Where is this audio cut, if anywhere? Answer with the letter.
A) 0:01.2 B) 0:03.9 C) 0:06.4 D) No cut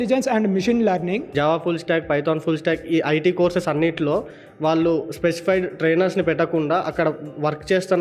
A